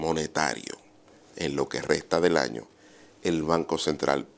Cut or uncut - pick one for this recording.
uncut